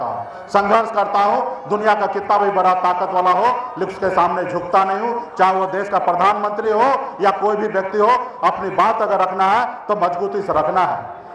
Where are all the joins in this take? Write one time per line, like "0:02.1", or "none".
none

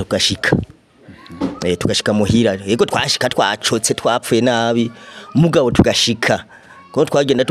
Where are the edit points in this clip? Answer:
none

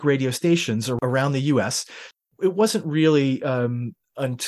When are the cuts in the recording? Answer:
0:01.0
0:02.2

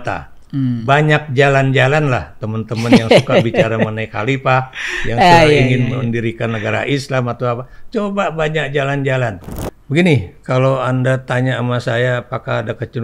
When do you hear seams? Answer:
0:09.4

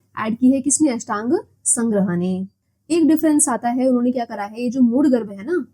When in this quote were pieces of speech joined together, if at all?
0:02.6

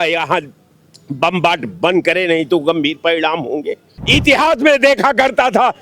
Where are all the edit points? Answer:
0:04.0

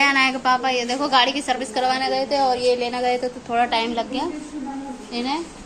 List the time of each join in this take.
none

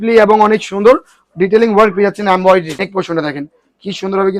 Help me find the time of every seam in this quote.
0:02.7

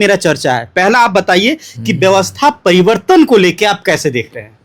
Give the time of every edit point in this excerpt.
none

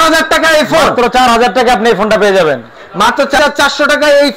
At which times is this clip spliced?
0:03.4

